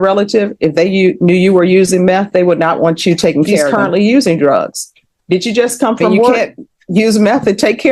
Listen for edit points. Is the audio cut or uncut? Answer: cut